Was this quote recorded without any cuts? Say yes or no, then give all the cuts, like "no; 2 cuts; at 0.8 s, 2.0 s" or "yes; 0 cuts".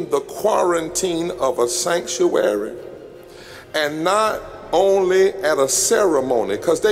yes; 0 cuts